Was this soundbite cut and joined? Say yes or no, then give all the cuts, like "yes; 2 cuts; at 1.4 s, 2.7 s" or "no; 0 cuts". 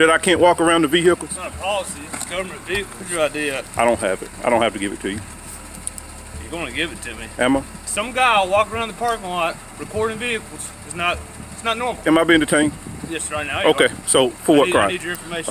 yes; 3 cuts; at 3.0 s, 7.8 s, 12.0 s